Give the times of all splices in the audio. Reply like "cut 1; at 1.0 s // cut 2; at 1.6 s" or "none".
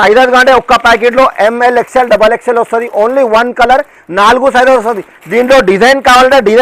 none